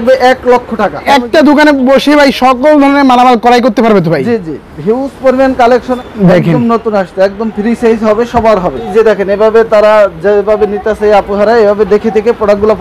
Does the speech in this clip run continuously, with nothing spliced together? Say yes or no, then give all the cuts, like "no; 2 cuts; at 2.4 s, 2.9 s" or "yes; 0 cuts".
no; 3 cuts; at 1.1 s, 5.9 s, 8.9 s